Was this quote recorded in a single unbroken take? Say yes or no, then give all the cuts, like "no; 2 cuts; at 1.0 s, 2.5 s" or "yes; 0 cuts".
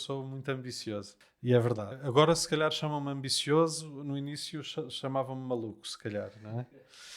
no; 2 cuts; at 1.2 s, 1.9 s